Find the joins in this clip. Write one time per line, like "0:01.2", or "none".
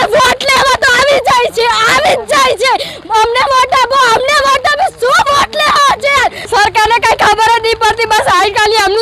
0:06.4